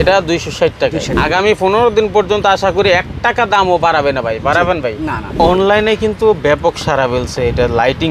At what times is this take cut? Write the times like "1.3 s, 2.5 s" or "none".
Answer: 1.1 s, 5.3 s